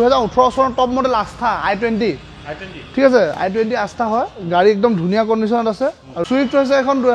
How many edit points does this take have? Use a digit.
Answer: 1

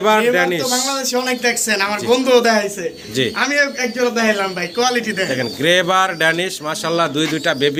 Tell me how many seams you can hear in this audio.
0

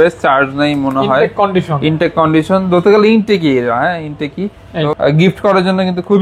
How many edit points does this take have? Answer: 1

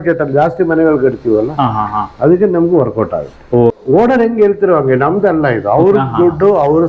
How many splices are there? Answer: 1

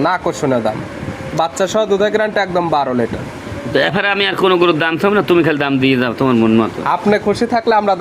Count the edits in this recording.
0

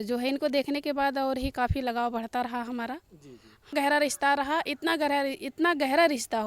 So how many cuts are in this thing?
1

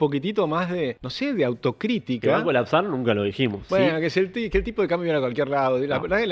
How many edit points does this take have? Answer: 2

